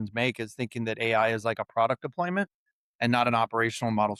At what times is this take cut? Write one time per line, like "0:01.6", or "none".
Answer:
none